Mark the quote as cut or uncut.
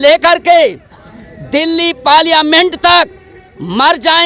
uncut